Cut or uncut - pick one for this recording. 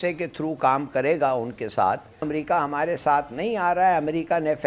cut